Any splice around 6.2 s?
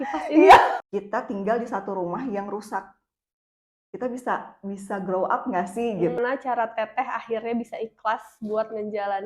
yes; 2 cuts; at 0.8 s, 6.2 s

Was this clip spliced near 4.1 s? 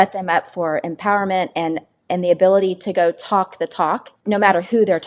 yes; 1 cut; at 4.1 s

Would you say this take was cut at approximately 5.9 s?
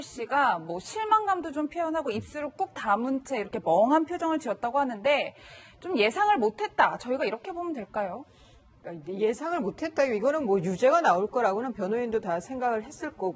no; 1 cut; at 10.1 s

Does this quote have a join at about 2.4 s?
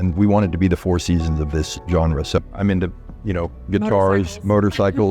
yes; 1 cut; at 2.4 s

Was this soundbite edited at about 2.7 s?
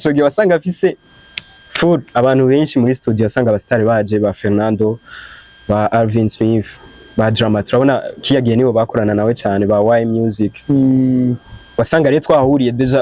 no; 0 cuts

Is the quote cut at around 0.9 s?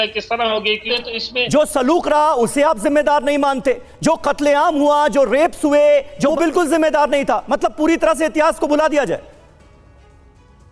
yes; 2 cuts; at 0.9 s, 6.3 s

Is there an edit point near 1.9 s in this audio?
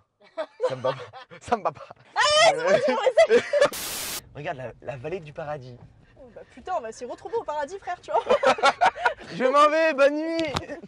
yes; 3 cuts; at 1.9 s, 3.8 s, 9.3 s

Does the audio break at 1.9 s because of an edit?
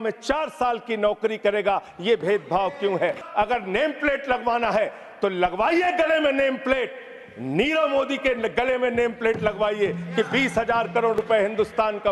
no; 1 cut; at 3.2 s

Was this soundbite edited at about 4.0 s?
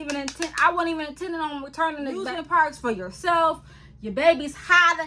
no; 1 cut; at 2.4 s

